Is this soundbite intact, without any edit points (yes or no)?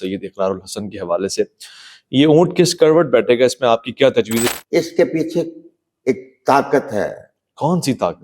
no